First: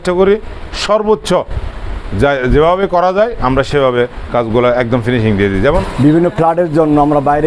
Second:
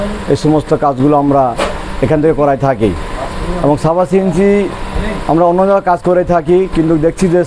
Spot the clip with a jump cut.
first; 1 cut; at 5.9 s

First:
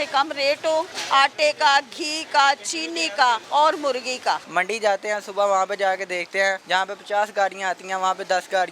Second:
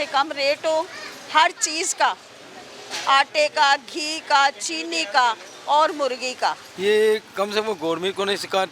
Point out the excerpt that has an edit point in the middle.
first; 4 cuts; at 1.0 s, 3.4 s, 4.5 s, 6.6 s

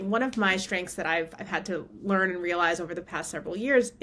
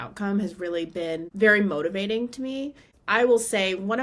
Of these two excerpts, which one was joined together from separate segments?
second; 1 cut; at 2.9 s

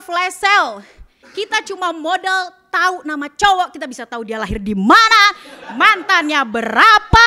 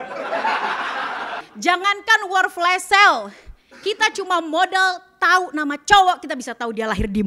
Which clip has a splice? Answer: second; 1 cut; at 1.4 s

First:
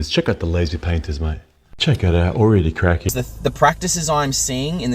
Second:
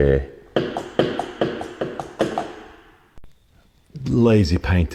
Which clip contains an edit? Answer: first; 1 cut; at 3.1 s

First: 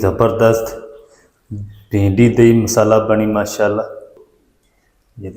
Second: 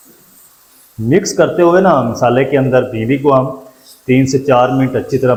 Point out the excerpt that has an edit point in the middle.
first; 1 cut; at 4.2 s

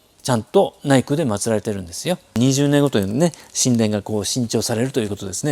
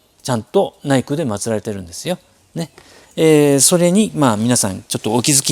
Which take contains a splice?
first; 1 cut; at 2.4 s

